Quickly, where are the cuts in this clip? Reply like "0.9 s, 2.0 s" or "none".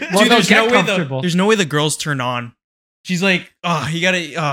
none